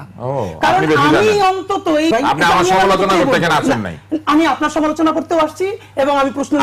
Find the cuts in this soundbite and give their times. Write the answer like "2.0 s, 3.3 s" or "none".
2.1 s